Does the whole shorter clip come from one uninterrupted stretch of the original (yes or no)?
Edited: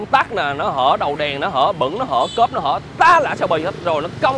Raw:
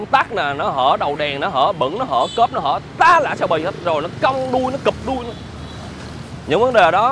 yes